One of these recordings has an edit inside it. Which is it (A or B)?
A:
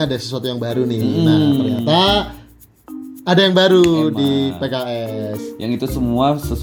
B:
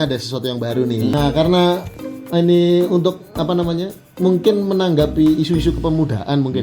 B